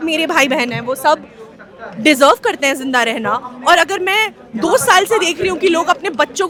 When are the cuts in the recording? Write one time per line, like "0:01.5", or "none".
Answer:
none

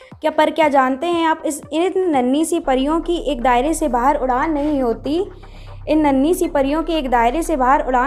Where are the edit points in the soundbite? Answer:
none

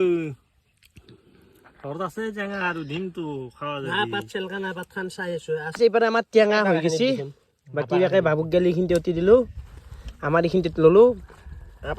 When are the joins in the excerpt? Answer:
0:05.7

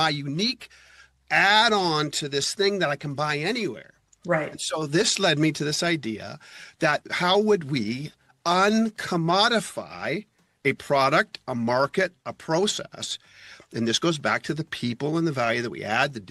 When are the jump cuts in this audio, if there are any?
none

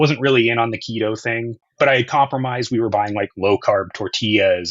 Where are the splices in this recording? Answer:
0:01.6

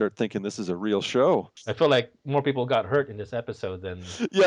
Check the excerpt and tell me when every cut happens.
0:01.6

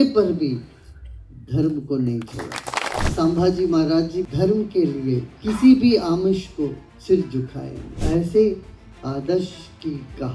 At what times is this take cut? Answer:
0:03.0
0:04.2
0:05.3
0:06.9
0:08.0

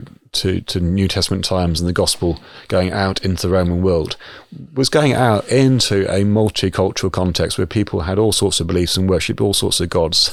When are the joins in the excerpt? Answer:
none

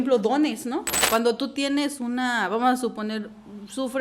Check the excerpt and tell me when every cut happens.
0:00.9

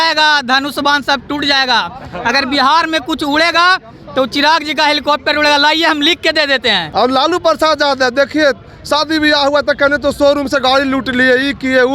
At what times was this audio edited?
0:06.8

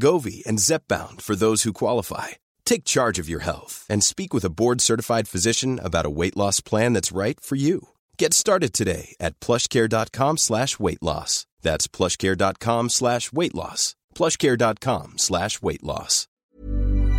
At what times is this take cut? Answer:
0:16.3

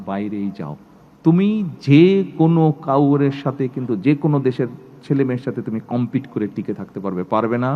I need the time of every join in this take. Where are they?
none

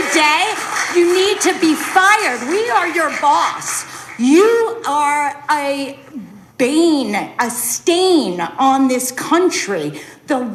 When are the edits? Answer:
none

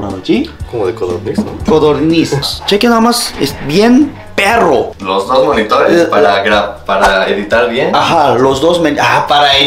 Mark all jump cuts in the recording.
0:02.5

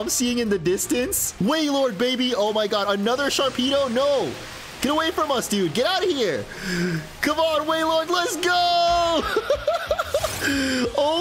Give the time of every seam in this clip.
0:01.2

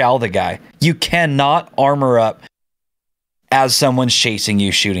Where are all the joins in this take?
none

